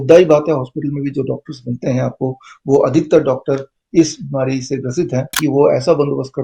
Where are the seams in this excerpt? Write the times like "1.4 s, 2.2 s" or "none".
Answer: 5.4 s